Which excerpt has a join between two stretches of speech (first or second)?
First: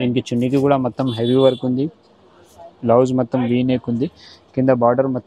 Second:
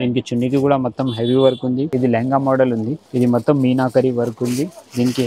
second